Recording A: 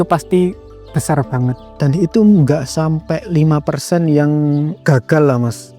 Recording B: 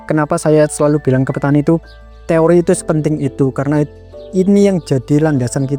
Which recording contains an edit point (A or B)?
A